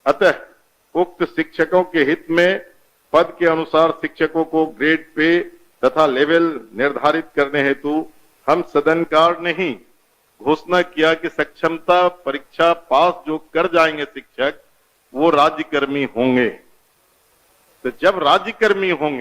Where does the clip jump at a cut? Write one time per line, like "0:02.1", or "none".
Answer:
0:09.1